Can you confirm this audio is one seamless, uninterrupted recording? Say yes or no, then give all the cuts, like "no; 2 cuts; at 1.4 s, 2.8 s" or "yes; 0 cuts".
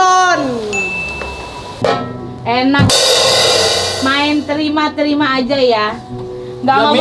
no; 1 cut; at 1.7 s